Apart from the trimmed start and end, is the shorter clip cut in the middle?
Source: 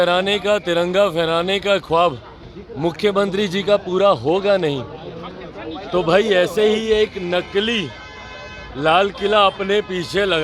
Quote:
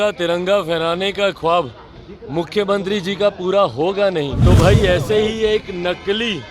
yes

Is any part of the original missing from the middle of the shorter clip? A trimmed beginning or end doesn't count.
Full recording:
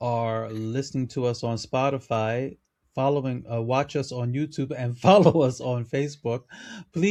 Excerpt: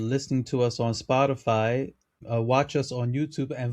yes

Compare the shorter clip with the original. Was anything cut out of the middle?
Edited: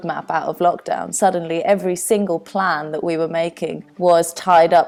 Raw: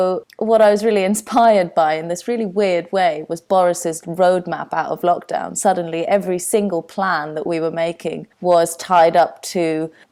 no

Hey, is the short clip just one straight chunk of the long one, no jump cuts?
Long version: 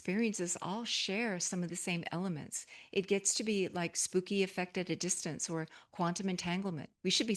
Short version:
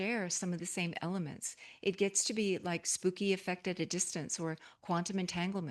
yes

